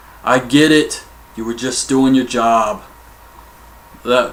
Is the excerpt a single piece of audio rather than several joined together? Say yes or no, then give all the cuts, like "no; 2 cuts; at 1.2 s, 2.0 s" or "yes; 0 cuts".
yes; 0 cuts